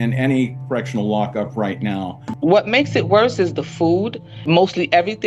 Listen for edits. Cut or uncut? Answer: cut